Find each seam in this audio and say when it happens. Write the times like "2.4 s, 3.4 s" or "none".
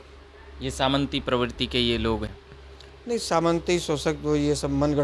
2.3 s